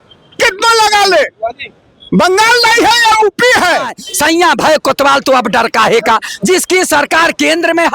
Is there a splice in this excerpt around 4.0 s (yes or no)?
yes